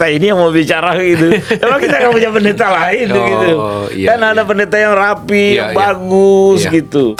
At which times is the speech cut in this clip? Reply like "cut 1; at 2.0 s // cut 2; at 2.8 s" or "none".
none